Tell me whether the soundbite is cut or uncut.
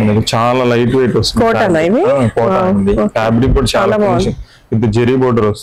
uncut